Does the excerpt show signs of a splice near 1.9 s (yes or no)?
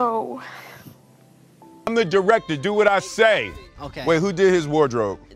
yes